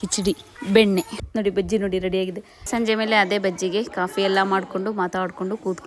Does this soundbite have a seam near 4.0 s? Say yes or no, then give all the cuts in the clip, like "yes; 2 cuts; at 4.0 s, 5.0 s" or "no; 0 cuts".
no; 1 cut; at 2.6 s